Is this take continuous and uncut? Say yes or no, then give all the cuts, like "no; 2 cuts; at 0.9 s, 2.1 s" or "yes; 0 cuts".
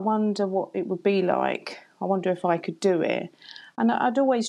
yes; 0 cuts